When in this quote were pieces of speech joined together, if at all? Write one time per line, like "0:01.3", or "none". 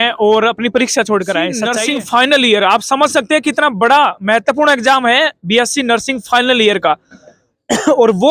0:01.6